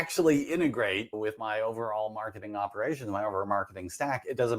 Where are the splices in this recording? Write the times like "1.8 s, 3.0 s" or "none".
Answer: 1.1 s